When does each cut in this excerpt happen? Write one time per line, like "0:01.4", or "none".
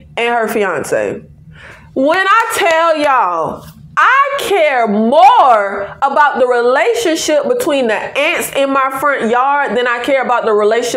none